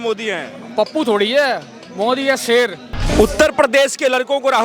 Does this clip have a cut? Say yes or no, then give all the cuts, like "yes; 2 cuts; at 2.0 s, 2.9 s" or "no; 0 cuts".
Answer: yes; 1 cut; at 3.1 s